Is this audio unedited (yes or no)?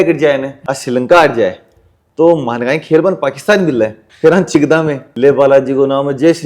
no